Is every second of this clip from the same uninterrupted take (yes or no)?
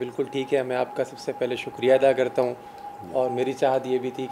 yes